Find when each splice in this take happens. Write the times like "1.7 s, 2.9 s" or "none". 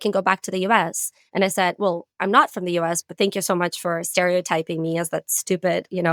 none